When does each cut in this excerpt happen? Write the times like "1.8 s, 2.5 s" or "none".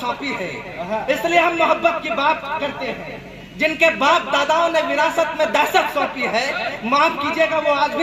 none